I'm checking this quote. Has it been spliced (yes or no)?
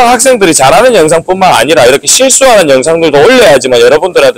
no